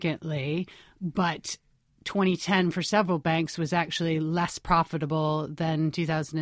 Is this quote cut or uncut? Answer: uncut